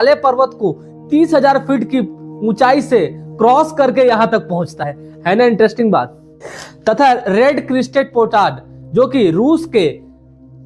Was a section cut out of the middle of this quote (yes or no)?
no